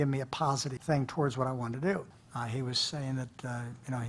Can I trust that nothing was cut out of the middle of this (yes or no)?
yes